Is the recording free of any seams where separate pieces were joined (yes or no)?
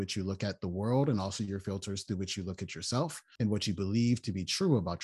no